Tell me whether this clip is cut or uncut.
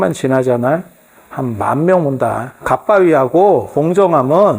cut